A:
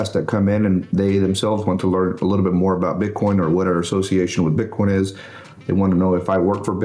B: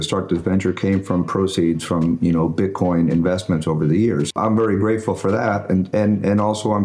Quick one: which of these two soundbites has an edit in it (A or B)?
B